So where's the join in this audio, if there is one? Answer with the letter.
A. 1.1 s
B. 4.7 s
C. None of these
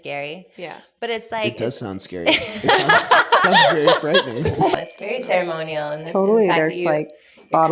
B